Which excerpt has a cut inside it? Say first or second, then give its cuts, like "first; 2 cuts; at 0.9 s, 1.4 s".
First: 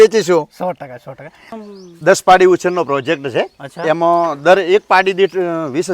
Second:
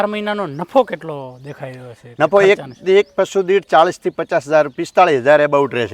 first; 1 cut; at 1.5 s